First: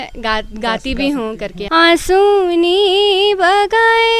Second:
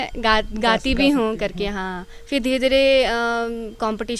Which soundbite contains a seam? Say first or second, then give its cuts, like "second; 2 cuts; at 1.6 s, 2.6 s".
first; 1 cut; at 1.5 s